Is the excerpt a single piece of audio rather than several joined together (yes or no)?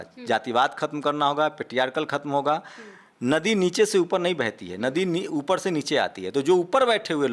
yes